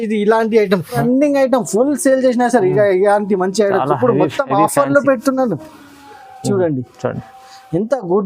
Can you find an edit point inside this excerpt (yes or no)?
yes